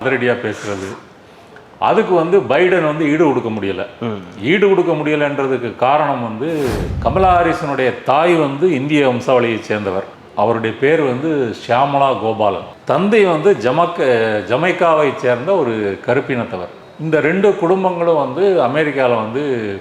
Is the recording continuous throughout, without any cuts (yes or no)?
no